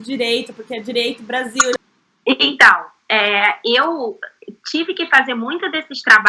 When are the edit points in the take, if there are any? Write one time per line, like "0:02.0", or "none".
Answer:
0:01.8